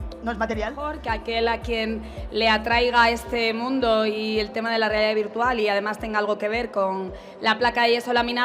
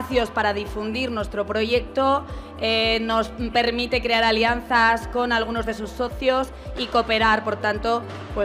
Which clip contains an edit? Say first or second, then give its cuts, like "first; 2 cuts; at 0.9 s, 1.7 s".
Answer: first; 1 cut; at 1.0 s